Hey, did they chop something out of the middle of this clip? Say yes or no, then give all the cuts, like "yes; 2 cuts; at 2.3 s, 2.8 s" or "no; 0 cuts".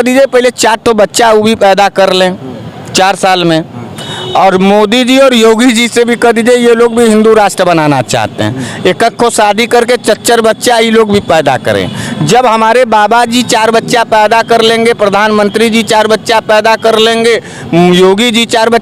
no; 0 cuts